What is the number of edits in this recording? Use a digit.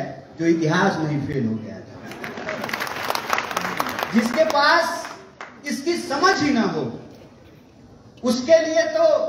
1